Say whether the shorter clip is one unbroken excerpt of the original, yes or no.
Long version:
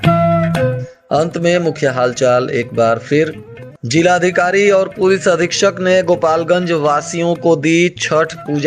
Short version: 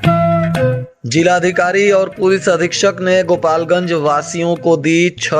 no